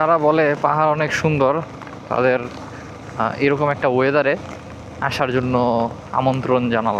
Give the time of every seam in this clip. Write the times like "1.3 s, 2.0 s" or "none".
none